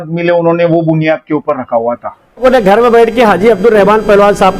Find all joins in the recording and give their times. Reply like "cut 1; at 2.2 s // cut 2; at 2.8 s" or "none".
cut 1; at 2.4 s